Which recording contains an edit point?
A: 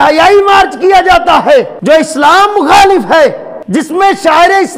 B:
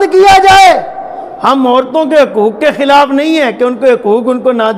A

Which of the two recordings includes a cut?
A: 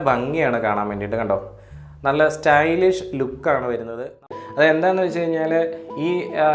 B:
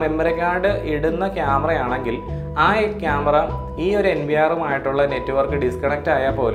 A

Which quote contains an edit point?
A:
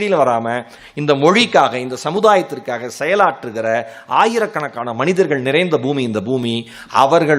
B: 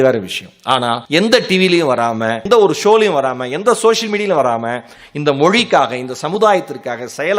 B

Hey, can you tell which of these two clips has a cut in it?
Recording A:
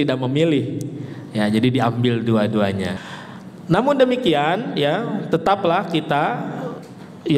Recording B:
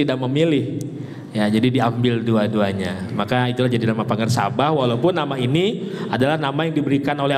A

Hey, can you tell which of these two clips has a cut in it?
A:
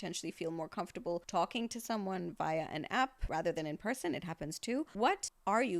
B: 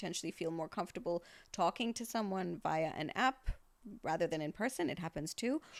A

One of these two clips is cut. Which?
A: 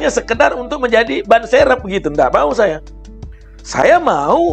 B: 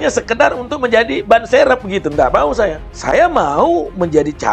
B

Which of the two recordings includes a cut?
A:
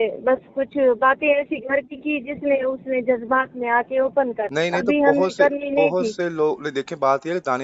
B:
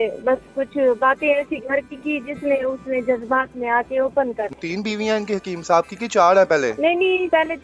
B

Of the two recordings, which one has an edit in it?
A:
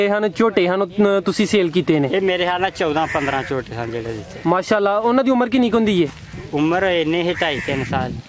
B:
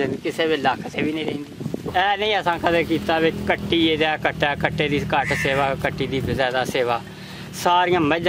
B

